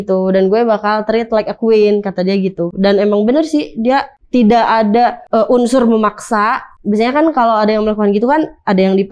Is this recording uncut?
no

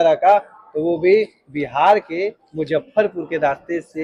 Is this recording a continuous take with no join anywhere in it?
yes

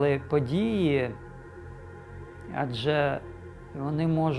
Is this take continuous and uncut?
no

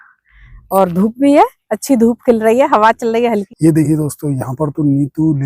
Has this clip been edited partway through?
yes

